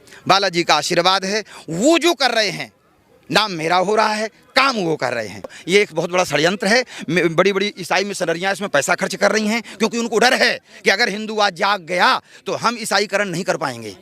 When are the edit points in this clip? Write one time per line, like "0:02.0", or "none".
0:05.6